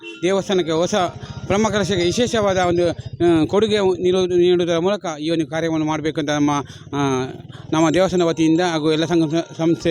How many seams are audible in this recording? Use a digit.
0